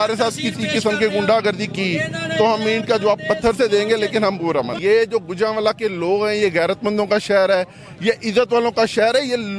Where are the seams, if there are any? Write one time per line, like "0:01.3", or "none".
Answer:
0:04.7